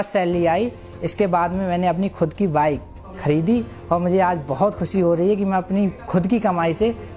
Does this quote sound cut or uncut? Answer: uncut